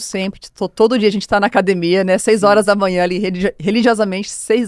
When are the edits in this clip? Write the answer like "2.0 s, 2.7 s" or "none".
none